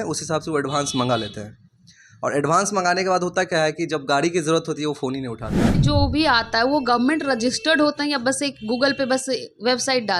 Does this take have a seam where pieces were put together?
yes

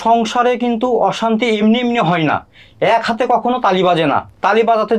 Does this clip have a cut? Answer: no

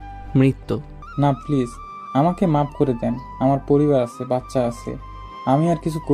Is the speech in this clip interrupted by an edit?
yes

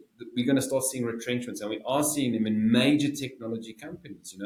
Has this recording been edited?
no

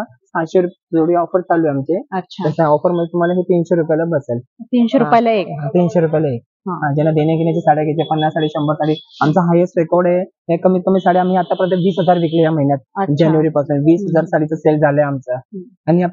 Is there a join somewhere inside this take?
no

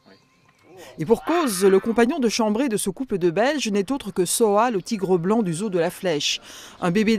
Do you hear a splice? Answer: no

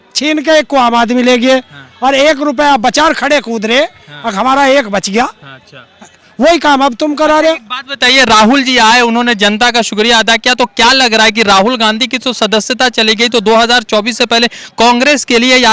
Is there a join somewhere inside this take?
no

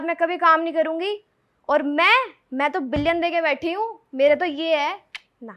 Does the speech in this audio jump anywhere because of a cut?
no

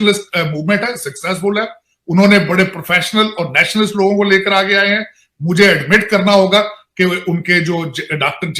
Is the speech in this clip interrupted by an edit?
no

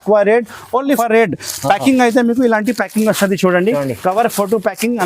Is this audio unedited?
no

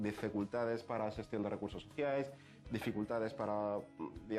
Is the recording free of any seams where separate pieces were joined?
yes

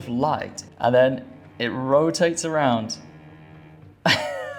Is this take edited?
no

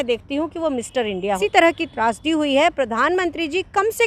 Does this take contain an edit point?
yes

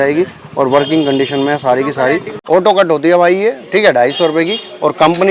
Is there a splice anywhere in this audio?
yes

